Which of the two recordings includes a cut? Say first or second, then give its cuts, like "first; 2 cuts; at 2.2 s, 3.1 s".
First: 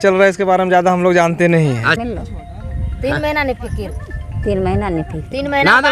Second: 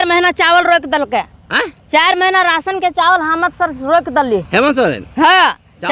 first; 1 cut; at 2.0 s